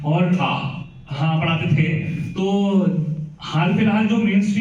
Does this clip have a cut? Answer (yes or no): no